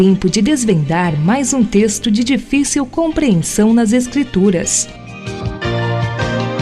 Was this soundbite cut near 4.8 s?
yes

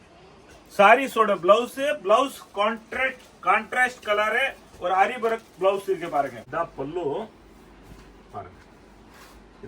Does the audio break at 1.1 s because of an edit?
no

